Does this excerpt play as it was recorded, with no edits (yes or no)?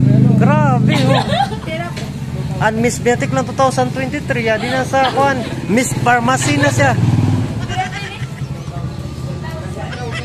yes